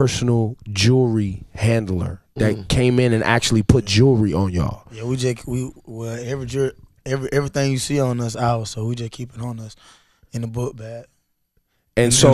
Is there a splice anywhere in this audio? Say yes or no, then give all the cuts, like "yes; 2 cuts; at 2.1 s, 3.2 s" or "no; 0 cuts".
no; 0 cuts